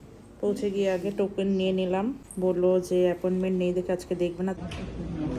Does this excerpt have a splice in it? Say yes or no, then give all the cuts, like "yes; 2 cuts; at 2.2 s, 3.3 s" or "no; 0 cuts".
yes; 2 cuts; at 2.2 s, 4.6 s